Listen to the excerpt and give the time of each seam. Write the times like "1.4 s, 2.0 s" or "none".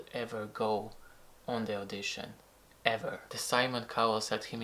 3.3 s